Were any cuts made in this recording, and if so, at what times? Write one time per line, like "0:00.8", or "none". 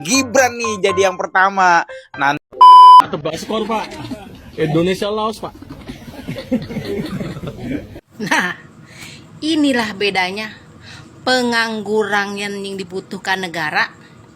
0:02.4
0:03.2